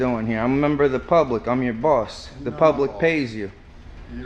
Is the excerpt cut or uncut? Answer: uncut